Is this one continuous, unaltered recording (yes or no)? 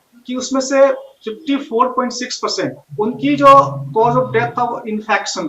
no